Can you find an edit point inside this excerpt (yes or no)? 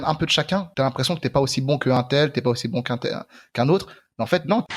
no